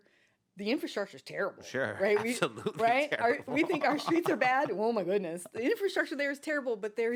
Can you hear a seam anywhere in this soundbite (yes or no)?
no